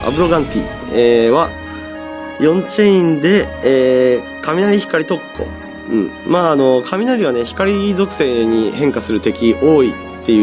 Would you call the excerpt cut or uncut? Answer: uncut